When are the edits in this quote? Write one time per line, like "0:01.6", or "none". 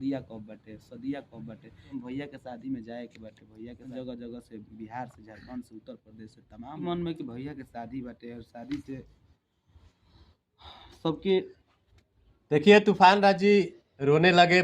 0:01.9
0:03.9
0:06.8